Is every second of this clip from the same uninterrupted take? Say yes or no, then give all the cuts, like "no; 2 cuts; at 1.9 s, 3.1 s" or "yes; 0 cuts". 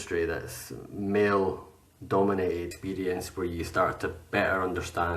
no; 1 cut; at 2.8 s